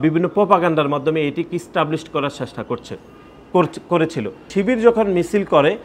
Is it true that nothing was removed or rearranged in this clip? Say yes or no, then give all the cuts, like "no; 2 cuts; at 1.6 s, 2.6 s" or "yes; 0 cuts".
yes; 0 cuts